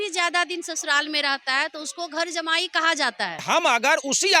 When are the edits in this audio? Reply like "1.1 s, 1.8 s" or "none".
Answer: 3.4 s